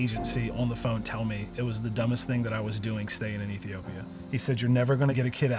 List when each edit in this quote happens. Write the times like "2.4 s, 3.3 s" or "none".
4.2 s